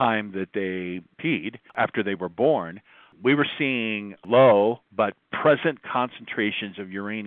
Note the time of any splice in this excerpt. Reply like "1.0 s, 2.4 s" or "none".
1.3 s